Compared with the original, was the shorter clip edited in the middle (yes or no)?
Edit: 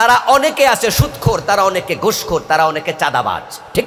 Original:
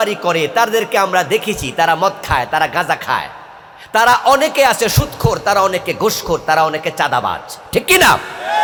no